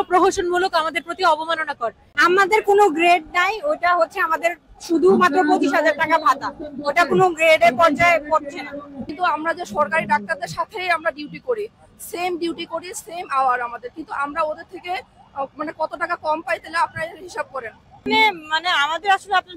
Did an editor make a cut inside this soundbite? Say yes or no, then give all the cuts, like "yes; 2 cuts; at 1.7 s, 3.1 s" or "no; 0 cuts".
yes; 3 cuts; at 2.1 s, 9.0 s, 18.1 s